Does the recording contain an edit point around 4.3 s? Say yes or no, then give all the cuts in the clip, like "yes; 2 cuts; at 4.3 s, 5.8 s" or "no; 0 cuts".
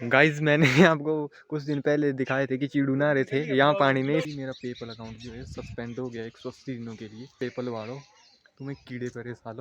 yes; 2 cuts; at 4.3 s, 7.3 s